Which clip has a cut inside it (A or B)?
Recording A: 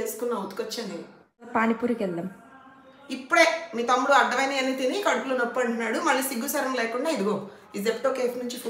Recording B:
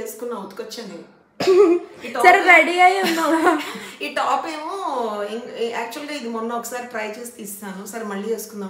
A